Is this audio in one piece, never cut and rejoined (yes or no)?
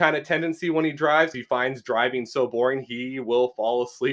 no